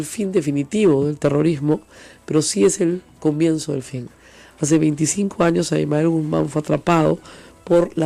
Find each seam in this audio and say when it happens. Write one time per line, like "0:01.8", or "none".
none